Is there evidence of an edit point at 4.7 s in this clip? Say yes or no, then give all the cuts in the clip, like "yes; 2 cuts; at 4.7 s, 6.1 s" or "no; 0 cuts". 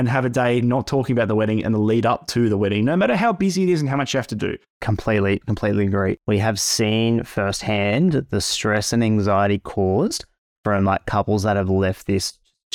yes; 2 cuts; at 4.7 s, 6.2 s